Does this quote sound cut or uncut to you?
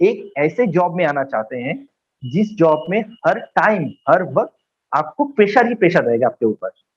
uncut